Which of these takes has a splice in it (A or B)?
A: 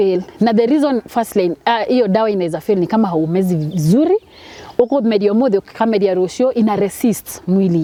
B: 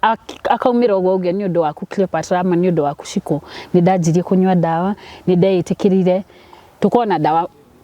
B